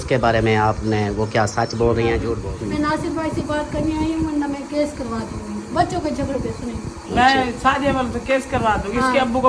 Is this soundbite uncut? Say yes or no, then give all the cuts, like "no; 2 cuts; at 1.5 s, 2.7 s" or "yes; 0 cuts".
no; 1 cut; at 2.5 s